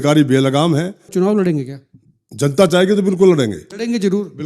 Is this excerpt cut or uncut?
cut